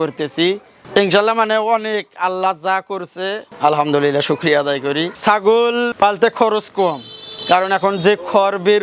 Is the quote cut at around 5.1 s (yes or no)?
yes